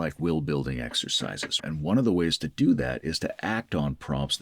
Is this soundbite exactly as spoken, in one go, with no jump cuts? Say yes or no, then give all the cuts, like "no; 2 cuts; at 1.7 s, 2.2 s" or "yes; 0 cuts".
no; 1 cut; at 1.6 s